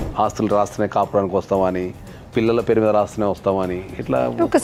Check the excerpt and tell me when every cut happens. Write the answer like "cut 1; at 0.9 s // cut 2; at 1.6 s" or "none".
none